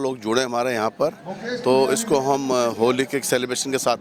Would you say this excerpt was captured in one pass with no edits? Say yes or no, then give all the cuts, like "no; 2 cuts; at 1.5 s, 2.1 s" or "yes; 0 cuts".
yes; 0 cuts